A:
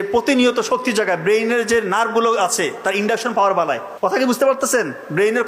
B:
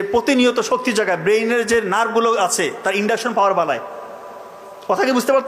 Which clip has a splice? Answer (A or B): A